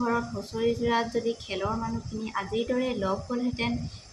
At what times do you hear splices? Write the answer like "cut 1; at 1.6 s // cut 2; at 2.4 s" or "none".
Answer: none